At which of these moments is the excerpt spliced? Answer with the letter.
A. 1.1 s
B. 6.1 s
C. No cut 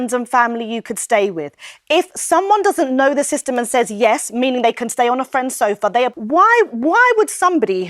B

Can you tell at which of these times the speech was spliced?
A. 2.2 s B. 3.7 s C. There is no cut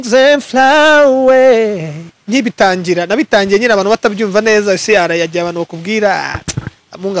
A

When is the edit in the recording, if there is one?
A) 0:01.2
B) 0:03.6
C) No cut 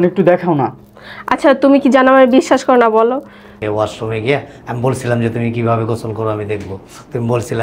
B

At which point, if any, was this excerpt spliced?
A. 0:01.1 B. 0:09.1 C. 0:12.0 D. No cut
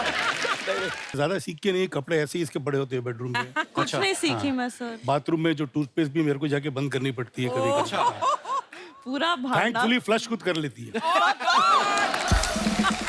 A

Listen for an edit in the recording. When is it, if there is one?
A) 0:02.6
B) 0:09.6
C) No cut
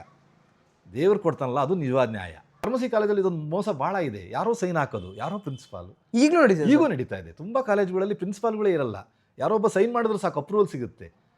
A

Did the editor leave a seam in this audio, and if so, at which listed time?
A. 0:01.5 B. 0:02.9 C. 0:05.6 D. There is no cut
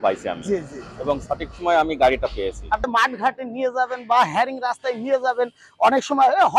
B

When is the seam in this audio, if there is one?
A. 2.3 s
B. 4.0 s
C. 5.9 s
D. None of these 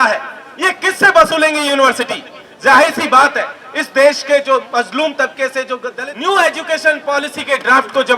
C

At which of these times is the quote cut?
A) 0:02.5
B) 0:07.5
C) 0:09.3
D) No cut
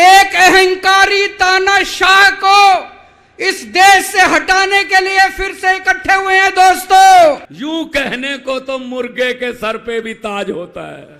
B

